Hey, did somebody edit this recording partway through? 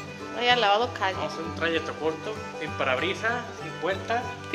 no; 0 cuts

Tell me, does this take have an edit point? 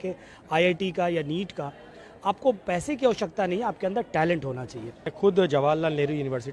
yes; 1 cut; at 5.1 s

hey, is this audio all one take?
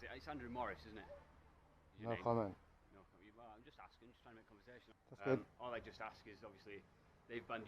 no; 1 cut; at 4.9 s

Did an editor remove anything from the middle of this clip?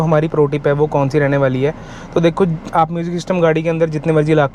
no; 0 cuts

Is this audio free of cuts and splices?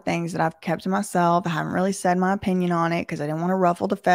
yes; 0 cuts

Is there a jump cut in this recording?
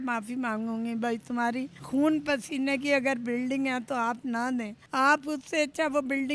yes; 2 cuts; at 1.8 s, 4.8 s

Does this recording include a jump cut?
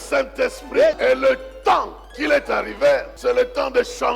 yes; 3 cuts; at 1.0 s, 2.1 s, 3.1 s

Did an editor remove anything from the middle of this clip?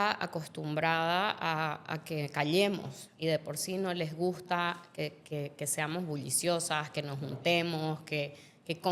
no; 0 cuts

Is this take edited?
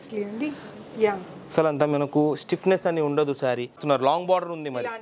yes; 1 cut; at 3.8 s

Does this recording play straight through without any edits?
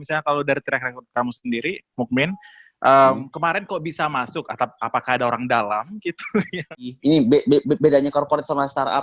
no; 1 cut; at 6.9 s

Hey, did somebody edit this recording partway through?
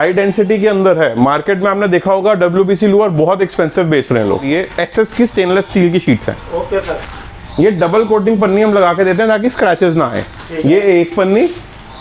yes; 1 cut; at 4.5 s

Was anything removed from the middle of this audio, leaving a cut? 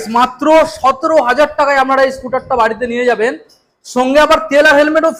no; 0 cuts

